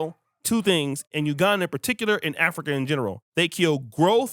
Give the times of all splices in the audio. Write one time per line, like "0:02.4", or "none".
0:01.1
0:03.2